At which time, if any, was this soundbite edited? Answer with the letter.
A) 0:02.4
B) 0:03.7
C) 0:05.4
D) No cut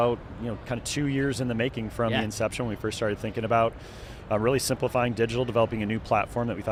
D